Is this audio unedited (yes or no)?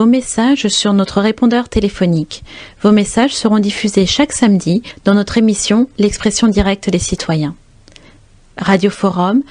no